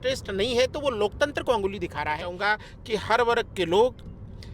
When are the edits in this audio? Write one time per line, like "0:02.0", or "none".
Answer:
0:02.3